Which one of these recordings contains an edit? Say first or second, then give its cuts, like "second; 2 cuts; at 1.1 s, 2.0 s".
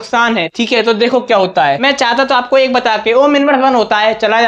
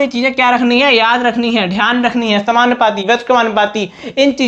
first; 1 cut; at 1.8 s